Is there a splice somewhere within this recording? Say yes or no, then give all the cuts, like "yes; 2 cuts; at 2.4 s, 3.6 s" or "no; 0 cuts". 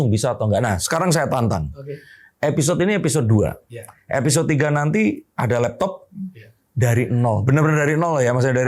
no; 0 cuts